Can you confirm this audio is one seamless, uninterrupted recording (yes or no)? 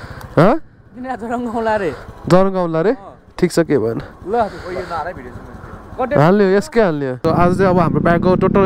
no